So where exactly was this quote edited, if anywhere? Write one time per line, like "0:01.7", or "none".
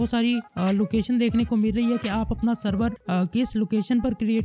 none